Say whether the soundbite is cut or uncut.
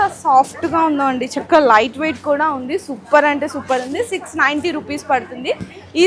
uncut